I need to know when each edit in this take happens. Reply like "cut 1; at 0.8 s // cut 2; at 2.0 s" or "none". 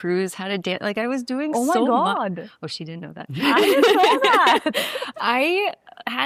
none